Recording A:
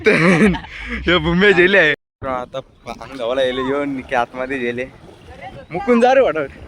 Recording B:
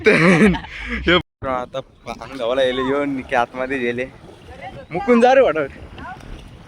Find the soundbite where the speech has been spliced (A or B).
B